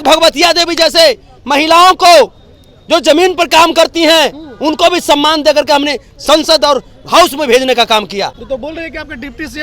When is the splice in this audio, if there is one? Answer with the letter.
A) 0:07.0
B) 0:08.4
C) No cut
B